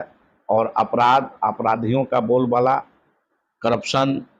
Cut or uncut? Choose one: uncut